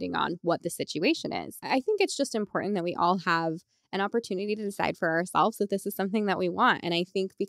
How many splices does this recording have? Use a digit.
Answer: 1